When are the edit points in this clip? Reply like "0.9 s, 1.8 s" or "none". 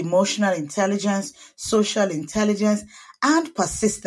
none